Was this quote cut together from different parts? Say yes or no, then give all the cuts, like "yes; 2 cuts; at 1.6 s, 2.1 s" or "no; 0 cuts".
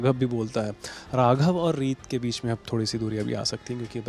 no; 0 cuts